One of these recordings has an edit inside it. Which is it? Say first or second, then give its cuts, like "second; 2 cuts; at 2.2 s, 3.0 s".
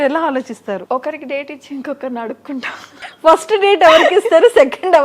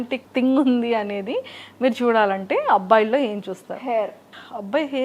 first; 2 cuts; at 0.8 s, 3.1 s